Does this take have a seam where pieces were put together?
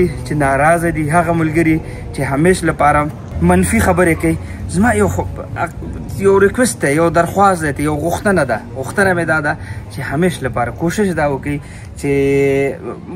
no; 0 cuts

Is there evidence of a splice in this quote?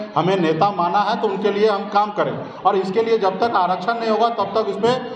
no; 0 cuts

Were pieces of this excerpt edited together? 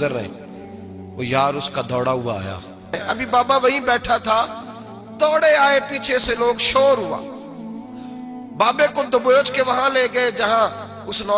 yes; 1 cut; at 3.0 s

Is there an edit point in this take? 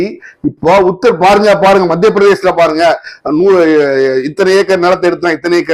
no; 0 cuts

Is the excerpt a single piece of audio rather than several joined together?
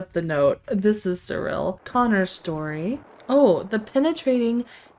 no; 2 cuts; at 1.8 s, 3.1 s

